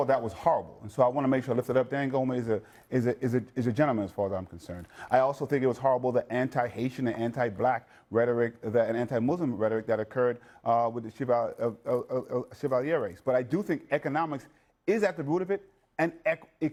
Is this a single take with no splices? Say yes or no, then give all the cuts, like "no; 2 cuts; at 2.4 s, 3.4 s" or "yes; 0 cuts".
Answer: yes; 0 cuts